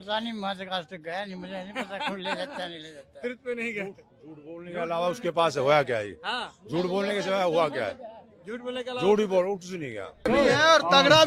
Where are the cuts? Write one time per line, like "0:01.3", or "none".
0:10.2